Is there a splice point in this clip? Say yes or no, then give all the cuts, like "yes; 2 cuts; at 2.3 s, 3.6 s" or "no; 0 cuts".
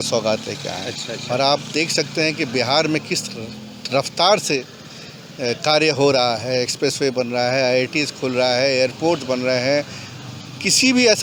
no; 0 cuts